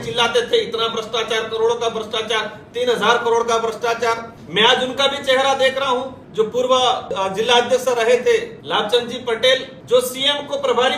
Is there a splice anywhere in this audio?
yes; 5 cuts; at 4.3 s, 6.2 s, 7.1 s, 8.6 s, 9.9 s

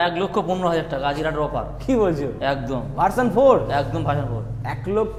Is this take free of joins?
yes; 0 cuts

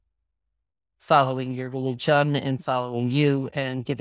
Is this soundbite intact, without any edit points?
yes; 0 cuts

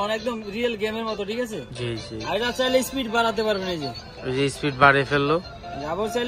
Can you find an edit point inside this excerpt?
no; 0 cuts

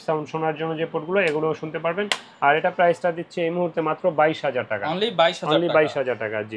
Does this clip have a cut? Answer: no; 0 cuts

